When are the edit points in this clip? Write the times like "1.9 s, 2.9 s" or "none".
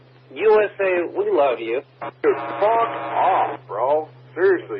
none